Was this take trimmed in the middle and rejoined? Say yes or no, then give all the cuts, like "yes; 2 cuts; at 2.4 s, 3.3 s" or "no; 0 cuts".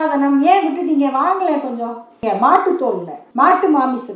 yes; 2 cuts; at 2.2 s, 3.2 s